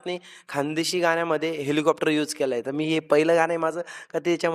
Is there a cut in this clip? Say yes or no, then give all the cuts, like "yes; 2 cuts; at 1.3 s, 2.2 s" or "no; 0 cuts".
no; 0 cuts